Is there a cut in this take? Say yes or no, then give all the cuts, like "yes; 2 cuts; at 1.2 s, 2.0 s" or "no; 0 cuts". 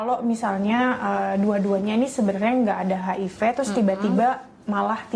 no; 0 cuts